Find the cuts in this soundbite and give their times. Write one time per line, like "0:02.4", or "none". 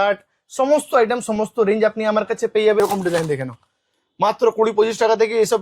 0:02.8